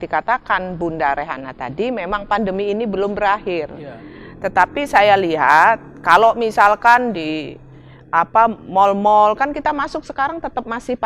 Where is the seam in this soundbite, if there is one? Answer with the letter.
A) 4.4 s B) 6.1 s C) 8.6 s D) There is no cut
D